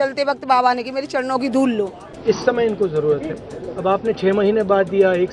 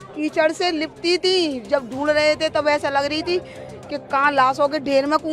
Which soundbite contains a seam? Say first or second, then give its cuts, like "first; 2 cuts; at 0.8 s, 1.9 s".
first; 1 cut; at 2.1 s